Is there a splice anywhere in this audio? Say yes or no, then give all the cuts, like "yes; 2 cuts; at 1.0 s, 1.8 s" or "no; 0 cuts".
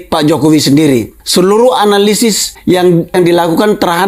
yes; 2 cuts; at 1.1 s, 3.0 s